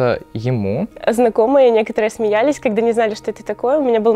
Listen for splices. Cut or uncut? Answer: cut